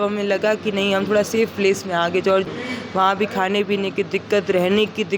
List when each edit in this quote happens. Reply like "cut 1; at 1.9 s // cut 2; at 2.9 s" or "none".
cut 1; at 2.5 s